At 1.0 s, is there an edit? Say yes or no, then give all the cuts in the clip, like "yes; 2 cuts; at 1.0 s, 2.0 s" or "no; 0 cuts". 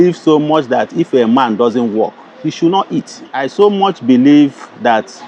no; 1 cut; at 3.4 s